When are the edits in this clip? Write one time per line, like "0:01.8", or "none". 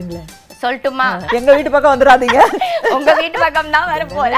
0:01.2